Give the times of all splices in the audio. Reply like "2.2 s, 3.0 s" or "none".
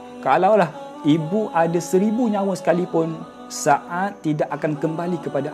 none